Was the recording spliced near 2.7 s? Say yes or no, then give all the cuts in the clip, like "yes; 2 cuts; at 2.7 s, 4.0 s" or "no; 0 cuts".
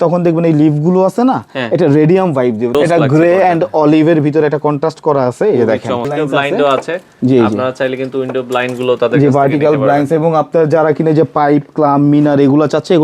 yes; 2 cuts; at 2.7 s, 6.1 s